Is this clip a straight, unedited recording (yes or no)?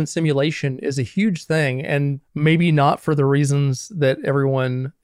no